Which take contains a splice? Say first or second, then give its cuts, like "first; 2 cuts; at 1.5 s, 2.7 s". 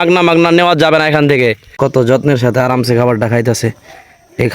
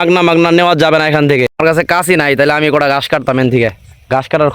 first; 1 cut; at 1.5 s